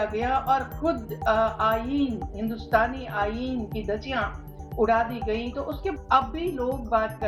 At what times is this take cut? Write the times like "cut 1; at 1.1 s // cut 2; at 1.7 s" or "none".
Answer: cut 1; at 5.9 s